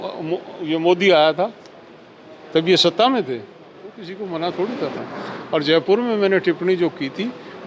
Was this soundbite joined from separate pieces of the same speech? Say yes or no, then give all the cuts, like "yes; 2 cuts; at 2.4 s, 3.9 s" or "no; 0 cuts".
yes; 1 cut; at 4.0 s